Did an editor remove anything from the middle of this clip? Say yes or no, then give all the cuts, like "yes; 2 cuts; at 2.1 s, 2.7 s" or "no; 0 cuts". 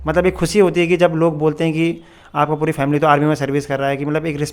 no; 0 cuts